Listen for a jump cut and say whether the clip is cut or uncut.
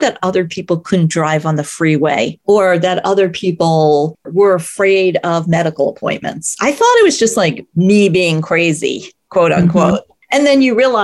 cut